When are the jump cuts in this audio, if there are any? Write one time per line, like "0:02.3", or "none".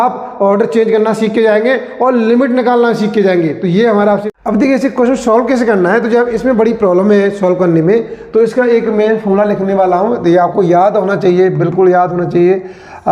0:04.3